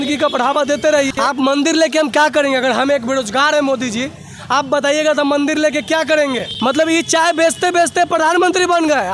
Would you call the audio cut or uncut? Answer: cut